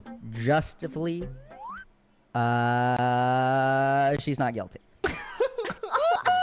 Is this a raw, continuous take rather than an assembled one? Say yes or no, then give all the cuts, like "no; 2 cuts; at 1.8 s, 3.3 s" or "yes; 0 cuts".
no; 1 cut; at 4.8 s